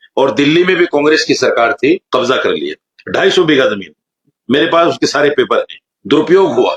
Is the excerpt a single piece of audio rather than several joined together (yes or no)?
yes